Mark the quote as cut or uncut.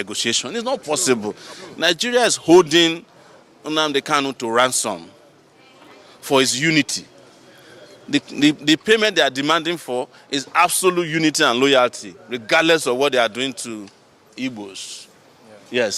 uncut